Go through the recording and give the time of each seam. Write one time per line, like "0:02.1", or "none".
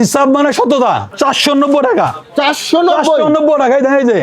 0:01.1